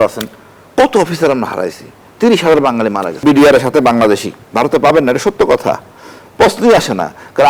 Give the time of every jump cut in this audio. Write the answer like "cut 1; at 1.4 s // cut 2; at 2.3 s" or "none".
cut 1; at 3.2 s // cut 2; at 4.4 s